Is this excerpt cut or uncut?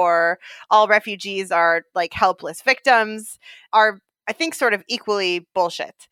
cut